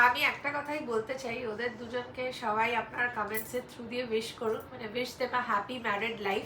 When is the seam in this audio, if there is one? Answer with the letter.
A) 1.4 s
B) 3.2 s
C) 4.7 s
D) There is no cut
D